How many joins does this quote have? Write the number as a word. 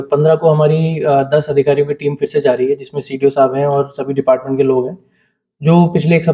zero